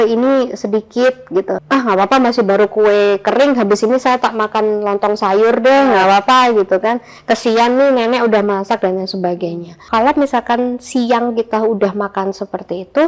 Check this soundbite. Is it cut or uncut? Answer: cut